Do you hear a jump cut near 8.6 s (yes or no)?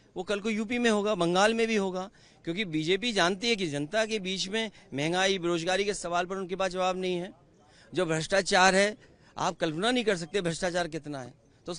no